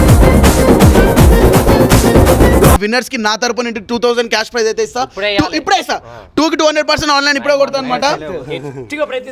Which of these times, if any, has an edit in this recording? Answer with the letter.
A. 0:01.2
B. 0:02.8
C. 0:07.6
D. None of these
B